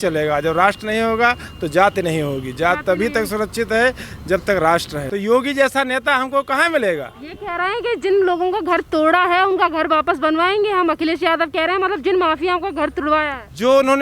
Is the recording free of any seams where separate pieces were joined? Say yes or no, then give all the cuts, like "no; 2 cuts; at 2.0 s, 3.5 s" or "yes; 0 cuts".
no; 1 cut; at 5.0 s